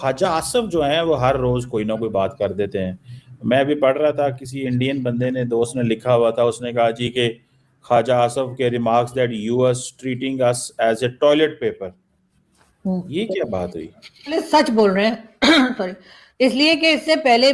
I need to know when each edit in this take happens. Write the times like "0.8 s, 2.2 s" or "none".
14.4 s